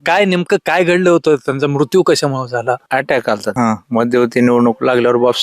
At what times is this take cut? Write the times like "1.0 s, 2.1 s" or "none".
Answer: 2.8 s, 3.5 s